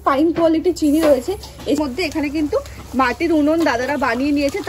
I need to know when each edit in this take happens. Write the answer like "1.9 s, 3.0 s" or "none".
1.8 s